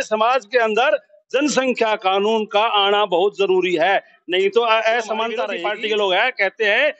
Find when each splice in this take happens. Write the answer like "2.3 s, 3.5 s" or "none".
5.5 s